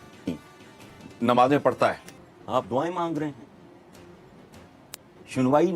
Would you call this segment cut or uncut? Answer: cut